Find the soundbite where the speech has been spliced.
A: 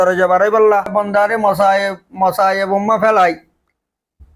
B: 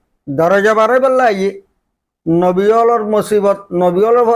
A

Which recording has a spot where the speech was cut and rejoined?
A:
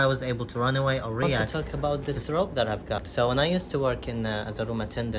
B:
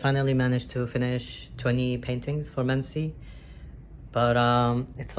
A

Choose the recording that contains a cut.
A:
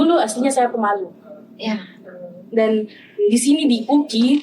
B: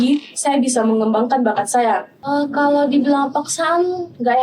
B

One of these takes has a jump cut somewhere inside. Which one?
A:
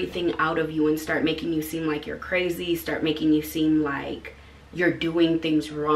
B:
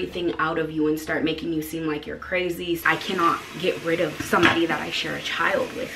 B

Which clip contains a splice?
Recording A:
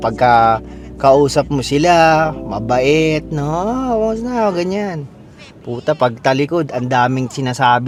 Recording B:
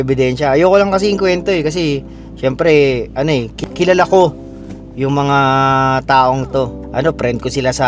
B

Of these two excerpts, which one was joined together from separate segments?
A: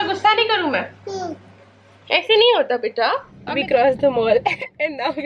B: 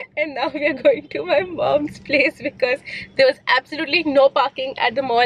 A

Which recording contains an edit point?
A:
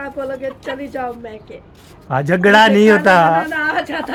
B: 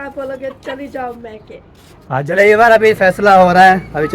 B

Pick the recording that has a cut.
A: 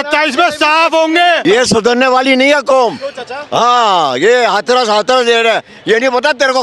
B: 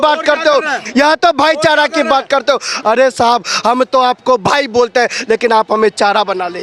A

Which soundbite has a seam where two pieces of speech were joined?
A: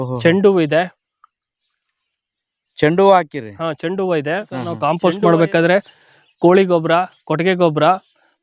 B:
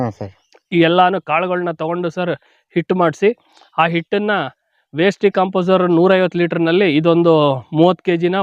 A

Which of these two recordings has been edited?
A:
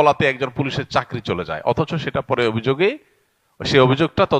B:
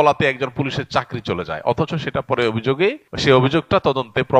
B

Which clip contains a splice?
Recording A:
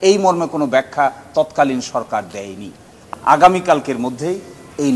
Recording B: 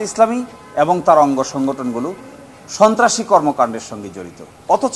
A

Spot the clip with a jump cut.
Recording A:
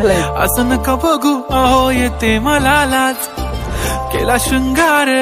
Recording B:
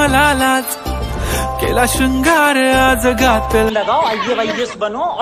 B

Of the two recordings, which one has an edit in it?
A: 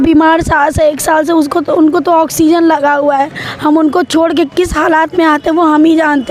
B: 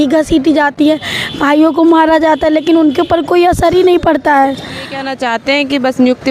B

